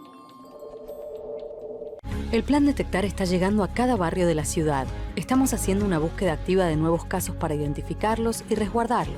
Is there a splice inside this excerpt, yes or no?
no